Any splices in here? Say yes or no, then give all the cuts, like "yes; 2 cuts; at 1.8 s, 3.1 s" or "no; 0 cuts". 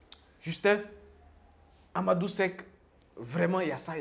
no; 0 cuts